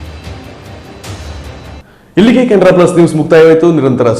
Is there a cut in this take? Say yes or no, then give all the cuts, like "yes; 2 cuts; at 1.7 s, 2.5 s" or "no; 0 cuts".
no; 0 cuts